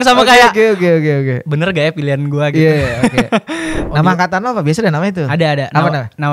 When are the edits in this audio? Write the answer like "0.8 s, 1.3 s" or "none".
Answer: 3.8 s